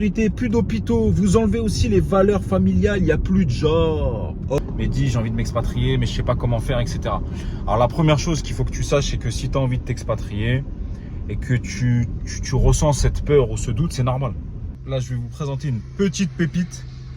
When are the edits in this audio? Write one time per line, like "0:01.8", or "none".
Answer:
0:04.6
0:14.8